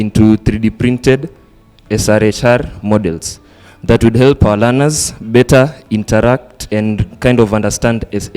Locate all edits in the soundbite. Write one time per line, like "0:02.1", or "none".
0:06.6